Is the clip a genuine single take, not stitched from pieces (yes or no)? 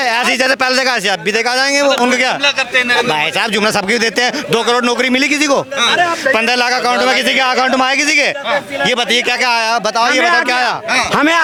yes